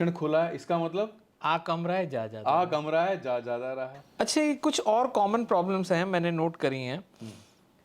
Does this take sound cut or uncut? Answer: cut